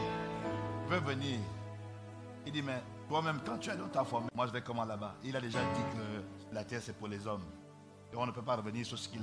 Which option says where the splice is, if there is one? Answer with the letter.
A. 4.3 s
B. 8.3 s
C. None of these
A